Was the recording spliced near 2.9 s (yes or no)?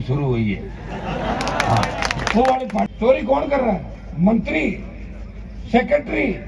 yes